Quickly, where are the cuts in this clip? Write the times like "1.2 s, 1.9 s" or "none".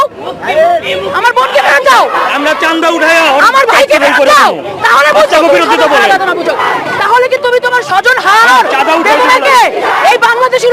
none